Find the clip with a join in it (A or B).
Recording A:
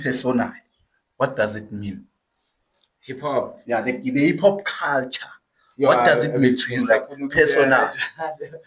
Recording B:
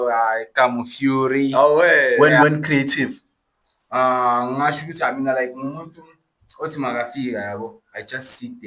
B